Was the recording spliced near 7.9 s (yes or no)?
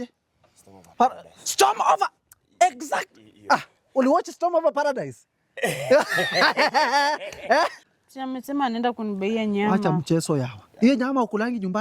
yes